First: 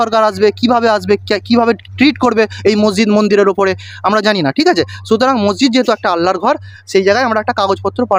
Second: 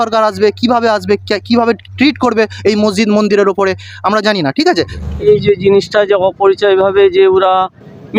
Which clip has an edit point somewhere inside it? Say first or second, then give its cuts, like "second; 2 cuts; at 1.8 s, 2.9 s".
second; 1 cut; at 5.0 s